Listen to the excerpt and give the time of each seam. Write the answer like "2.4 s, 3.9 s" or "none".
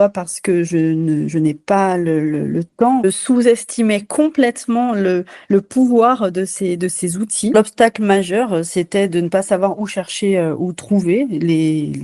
3.0 s, 7.5 s